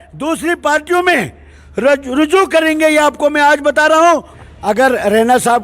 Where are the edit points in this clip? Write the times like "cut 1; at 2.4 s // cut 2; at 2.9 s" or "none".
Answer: cut 1; at 4.4 s